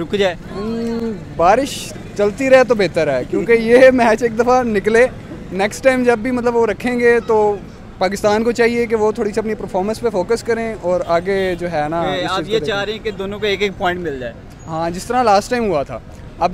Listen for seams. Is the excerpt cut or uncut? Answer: uncut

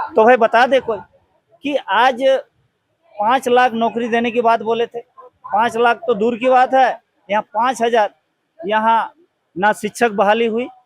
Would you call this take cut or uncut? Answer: uncut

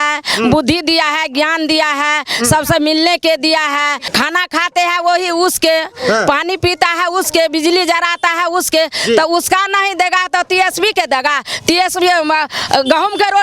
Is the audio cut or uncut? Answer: cut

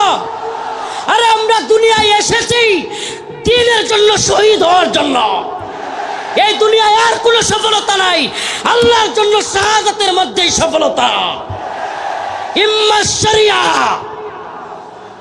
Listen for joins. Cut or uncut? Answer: uncut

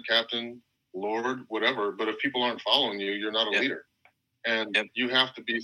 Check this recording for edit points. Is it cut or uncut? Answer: cut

